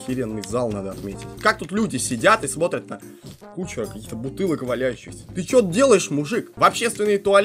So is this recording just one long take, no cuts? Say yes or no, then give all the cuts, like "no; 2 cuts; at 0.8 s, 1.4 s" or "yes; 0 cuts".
no; 2 cuts; at 1.3 s, 6.5 s